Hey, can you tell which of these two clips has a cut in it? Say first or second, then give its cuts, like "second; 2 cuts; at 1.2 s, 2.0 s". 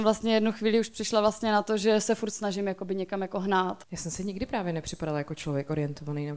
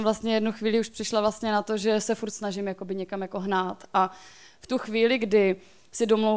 first; 1 cut; at 3.8 s